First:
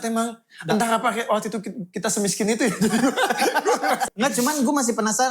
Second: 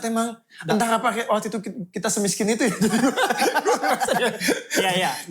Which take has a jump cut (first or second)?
first